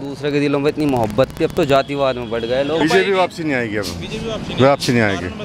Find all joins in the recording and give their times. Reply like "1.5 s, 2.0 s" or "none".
2.8 s